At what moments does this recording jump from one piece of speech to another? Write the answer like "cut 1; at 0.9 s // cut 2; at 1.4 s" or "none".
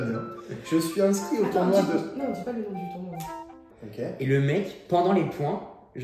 cut 1; at 3.7 s